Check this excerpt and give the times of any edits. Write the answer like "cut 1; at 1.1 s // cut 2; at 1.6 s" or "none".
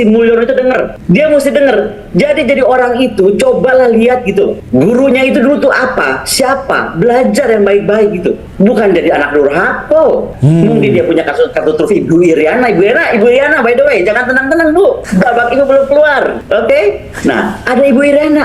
cut 1; at 0.9 s // cut 2; at 4.6 s // cut 3; at 8.4 s // cut 4; at 10.3 s // cut 5; at 11.5 s // cut 6; at 15.0 s // cut 7; at 16.4 s